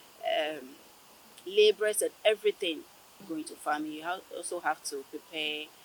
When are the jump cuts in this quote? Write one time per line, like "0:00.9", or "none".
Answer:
0:03.2